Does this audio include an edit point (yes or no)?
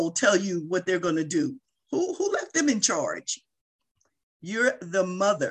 no